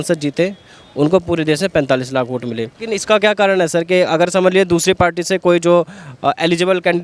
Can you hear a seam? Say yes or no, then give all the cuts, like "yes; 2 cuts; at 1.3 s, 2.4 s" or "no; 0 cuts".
yes; 1 cut; at 2.7 s